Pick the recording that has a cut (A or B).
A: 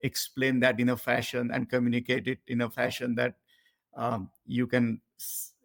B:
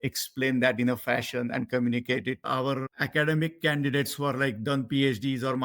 B